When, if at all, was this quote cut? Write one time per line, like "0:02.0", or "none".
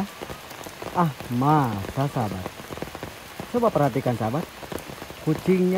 none